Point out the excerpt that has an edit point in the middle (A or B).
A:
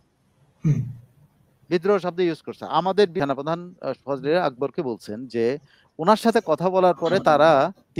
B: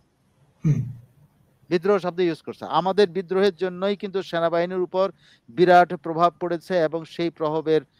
A